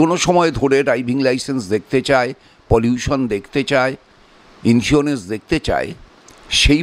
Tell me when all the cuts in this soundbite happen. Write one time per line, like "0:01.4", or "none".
none